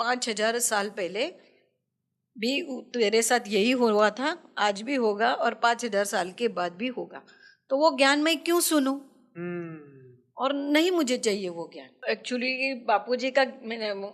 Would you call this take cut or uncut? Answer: cut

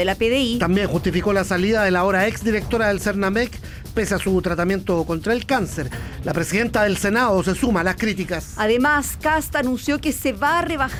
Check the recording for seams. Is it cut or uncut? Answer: uncut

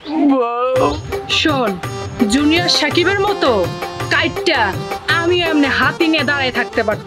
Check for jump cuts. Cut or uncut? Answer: cut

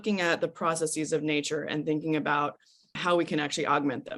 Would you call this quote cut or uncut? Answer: cut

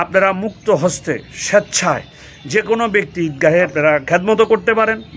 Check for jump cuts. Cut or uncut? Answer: cut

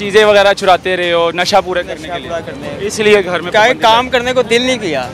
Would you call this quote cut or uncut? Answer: uncut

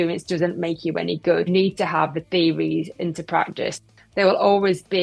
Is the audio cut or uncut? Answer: cut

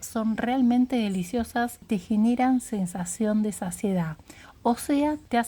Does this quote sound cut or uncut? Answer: cut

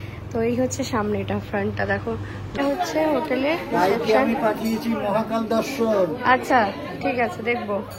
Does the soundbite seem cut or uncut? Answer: cut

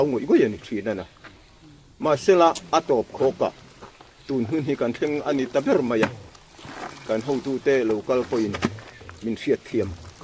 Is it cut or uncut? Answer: uncut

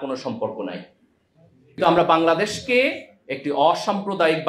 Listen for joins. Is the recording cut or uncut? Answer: cut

